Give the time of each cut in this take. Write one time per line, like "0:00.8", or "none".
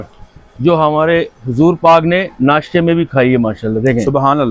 none